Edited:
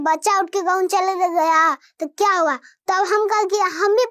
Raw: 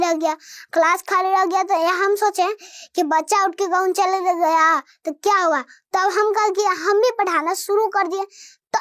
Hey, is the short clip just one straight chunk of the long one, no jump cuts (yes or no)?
yes